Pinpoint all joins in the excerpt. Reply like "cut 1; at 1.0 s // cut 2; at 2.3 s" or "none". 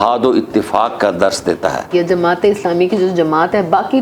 cut 1; at 1.9 s